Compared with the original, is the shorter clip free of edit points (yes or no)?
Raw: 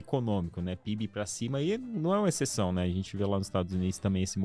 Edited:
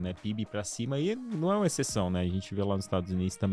yes